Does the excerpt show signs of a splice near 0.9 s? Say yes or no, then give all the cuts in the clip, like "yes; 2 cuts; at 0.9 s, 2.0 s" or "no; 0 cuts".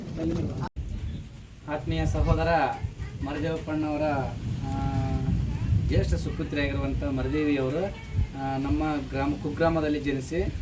yes; 1 cut; at 0.9 s